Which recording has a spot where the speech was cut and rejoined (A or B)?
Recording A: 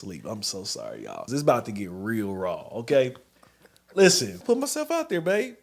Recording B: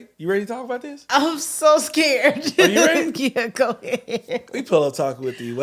A